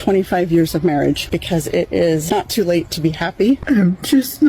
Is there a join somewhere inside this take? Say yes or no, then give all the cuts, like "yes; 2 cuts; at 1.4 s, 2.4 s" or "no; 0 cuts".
yes; 3 cuts; at 1.3 s, 2.2 s, 3.6 s